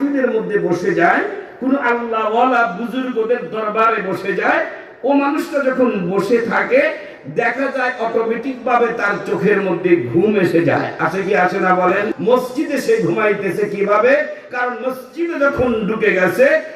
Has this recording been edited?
yes; 1 cut; at 12.1 s

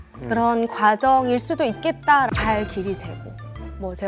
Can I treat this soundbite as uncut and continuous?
no; 1 cut; at 2.3 s

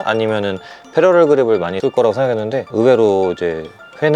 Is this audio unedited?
yes; 0 cuts

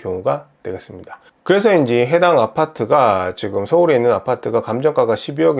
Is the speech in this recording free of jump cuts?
yes; 0 cuts

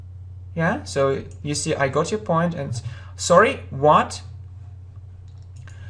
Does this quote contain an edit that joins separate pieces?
no; 0 cuts

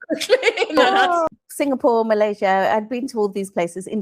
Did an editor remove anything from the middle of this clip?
yes; 1 cut; at 1.3 s

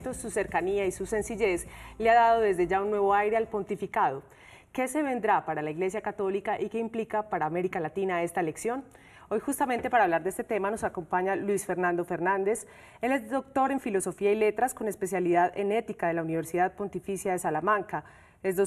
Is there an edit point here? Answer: yes; 1 cut; at 17.5 s

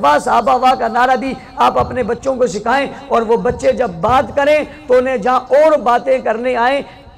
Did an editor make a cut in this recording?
no; 0 cuts

